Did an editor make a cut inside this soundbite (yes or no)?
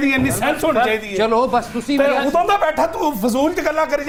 no